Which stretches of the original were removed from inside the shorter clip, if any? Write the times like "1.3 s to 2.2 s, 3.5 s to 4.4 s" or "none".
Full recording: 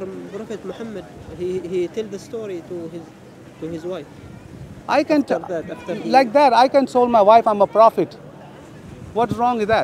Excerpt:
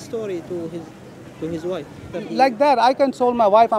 4.3 s to 5.8 s